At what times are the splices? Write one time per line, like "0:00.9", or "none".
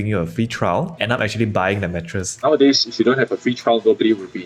0:01.0
0:02.4